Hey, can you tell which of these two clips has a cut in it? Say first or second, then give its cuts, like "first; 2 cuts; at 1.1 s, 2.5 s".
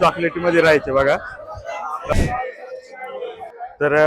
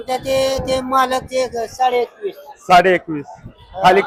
first; 1 cut; at 2.1 s